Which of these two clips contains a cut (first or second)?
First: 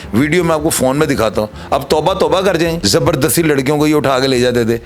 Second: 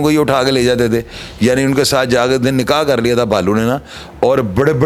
first